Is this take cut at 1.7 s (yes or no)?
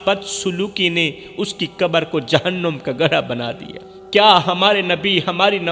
no